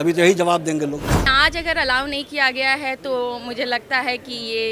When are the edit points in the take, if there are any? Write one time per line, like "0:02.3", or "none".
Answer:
0:01.3